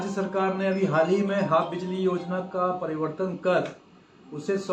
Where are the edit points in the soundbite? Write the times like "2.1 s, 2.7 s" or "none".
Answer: none